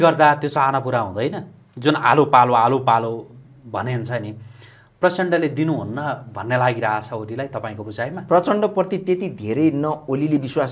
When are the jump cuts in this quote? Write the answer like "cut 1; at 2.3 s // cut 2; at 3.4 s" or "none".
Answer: none